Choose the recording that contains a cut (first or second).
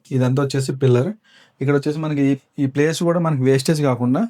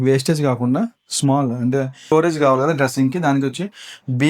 second